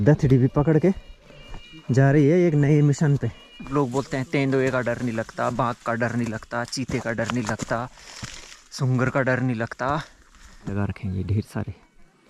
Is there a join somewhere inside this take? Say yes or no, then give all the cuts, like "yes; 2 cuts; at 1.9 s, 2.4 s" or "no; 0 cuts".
yes; 2 cuts; at 3.6 s, 10.7 s